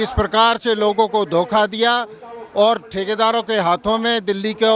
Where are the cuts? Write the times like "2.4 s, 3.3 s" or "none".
none